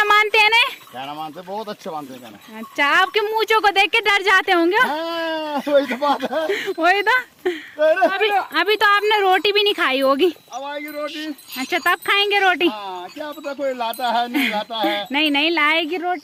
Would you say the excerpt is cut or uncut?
uncut